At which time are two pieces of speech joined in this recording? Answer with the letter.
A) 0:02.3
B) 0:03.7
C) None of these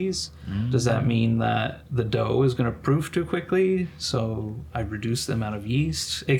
C